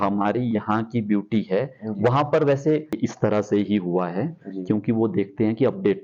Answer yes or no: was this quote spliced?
yes